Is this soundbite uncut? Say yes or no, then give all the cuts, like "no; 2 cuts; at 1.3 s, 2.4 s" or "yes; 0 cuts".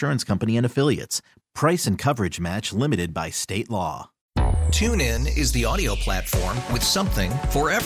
no; 1 cut; at 4.1 s